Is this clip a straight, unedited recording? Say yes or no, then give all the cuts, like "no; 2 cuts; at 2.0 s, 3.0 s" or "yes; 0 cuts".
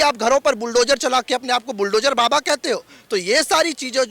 yes; 0 cuts